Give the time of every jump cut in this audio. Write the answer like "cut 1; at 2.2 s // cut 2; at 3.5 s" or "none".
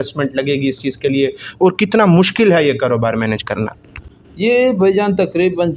none